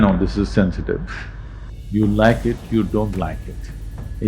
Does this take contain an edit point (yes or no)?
yes